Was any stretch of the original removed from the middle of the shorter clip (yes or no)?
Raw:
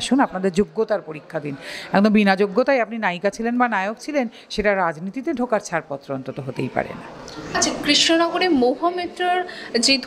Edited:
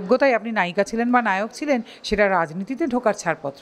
no